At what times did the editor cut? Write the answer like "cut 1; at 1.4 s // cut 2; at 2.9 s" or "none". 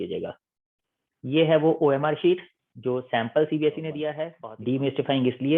cut 1; at 4.1 s